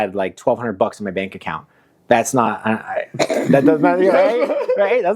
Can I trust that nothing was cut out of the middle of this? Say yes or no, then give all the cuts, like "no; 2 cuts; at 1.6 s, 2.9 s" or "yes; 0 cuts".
yes; 0 cuts